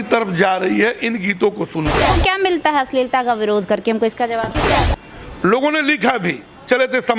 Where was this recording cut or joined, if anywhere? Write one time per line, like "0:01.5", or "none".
0:02.0
0:04.7